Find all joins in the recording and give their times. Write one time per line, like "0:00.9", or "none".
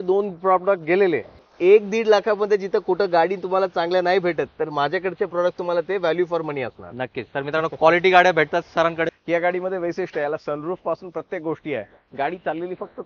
0:01.5
0:09.1